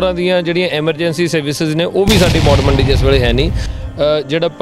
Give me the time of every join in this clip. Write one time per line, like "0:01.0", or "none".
0:03.7